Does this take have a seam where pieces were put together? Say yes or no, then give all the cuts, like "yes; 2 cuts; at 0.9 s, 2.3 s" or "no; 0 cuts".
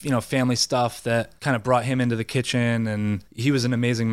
yes; 2 cuts; at 1.3 s, 3.3 s